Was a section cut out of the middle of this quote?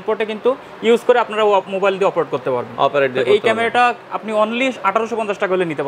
no; 0 cuts

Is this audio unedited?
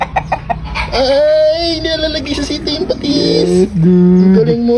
yes; 0 cuts

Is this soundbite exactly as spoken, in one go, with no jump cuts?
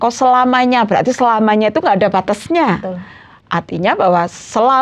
yes; 0 cuts

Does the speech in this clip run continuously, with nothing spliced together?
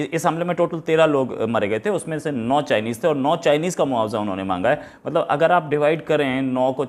yes; 0 cuts

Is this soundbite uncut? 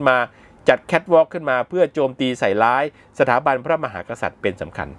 yes; 0 cuts

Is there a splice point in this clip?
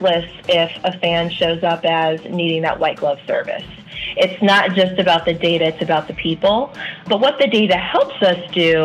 yes; 1 cut; at 7.0 s

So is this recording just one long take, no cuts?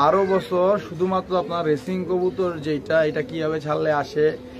yes; 0 cuts

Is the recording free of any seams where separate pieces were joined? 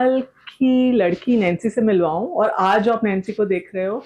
yes; 0 cuts

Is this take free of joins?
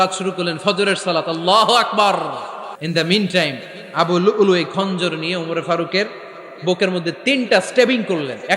no; 1 cut; at 2.8 s

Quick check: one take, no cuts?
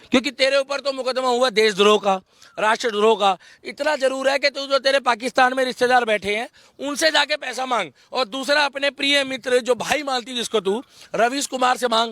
yes; 0 cuts

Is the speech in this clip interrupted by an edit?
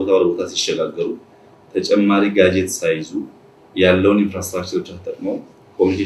no; 0 cuts

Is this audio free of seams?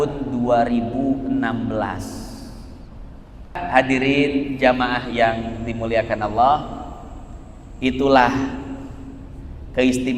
no; 1 cut; at 3.6 s

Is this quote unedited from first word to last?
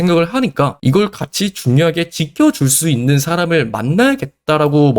yes; 0 cuts

